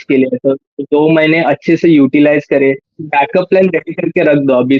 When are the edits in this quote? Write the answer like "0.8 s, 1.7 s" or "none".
2.9 s